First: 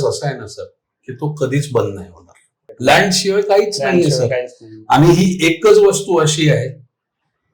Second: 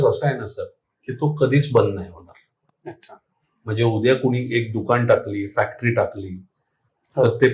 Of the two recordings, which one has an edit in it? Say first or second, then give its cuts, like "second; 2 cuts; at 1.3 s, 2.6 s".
first; 1 cut; at 2.7 s